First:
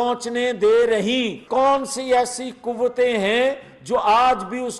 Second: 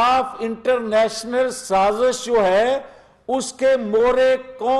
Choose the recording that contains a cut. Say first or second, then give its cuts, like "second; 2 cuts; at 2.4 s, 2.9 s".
first; 1 cut; at 1.4 s